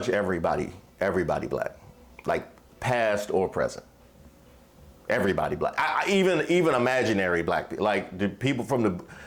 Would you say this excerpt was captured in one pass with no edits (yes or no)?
yes